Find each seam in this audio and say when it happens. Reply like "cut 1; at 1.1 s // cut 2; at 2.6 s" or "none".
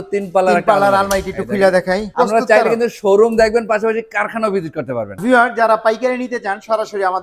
cut 1; at 2.1 s // cut 2; at 5.2 s